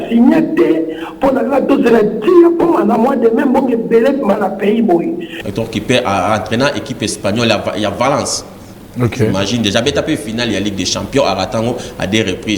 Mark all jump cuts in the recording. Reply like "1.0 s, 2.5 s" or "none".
5.3 s